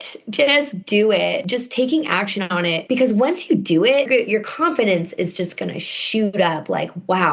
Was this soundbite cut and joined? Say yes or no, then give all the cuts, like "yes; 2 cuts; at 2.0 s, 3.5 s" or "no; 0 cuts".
yes; 3 cuts; at 1.4 s, 2.8 s, 4.1 s